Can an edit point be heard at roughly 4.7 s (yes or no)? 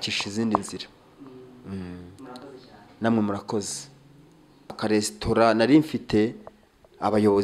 yes